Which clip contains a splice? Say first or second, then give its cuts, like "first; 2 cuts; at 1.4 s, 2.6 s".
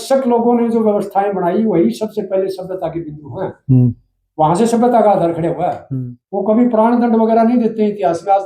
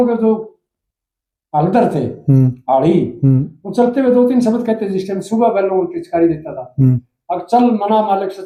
first; 1 cut; at 5.8 s